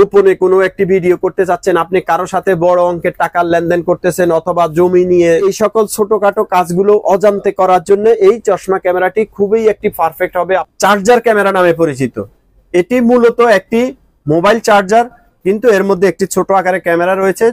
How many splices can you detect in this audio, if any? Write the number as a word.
two